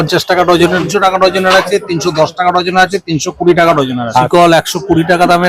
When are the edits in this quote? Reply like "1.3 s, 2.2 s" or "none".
0.8 s, 4.3 s